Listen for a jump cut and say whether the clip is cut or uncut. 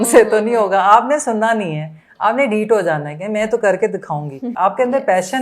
cut